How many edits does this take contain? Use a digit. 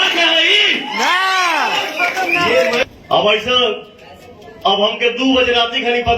1